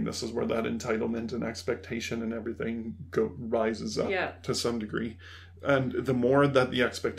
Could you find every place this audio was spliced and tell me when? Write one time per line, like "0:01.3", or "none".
none